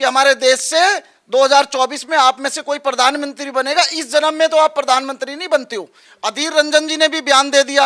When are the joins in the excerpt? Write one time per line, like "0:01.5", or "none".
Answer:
0:06.1